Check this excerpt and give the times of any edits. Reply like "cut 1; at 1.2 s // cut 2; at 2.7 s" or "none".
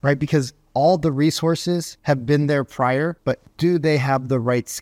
cut 1; at 1.9 s // cut 2; at 3.4 s